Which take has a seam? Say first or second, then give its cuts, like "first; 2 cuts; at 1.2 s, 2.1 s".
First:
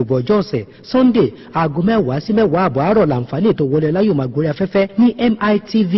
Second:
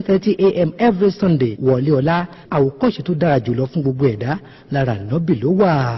second; 1 cut; at 5.0 s